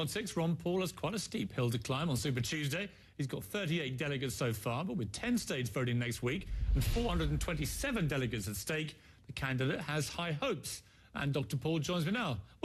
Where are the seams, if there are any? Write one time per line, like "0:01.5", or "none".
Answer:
none